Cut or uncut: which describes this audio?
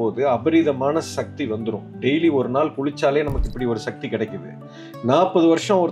uncut